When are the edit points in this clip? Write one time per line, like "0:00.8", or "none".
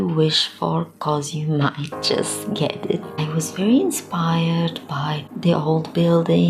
0:03.2
0:05.3